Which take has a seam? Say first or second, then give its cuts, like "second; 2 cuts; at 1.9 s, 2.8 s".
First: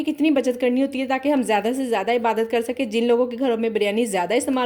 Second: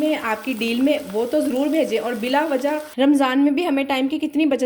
second; 1 cut; at 2.9 s